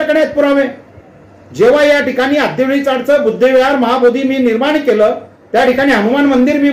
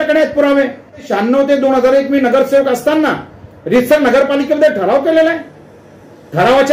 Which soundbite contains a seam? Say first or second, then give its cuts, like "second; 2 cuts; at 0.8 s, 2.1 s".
second; 1 cut; at 1.1 s